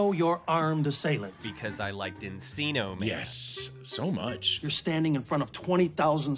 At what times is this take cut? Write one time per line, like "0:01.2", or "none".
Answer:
0:04.5